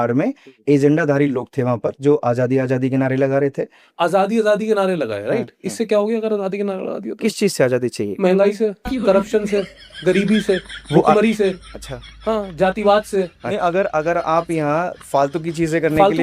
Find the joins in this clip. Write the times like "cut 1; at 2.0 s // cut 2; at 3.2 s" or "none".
cut 1; at 3.7 s // cut 2; at 13.4 s